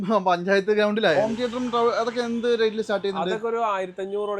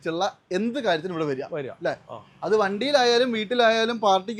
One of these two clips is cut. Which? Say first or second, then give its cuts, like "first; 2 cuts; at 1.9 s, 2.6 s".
first; 1 cut; at 1.2 s